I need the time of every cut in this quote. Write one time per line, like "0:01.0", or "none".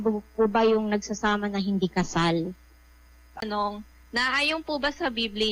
0:03.4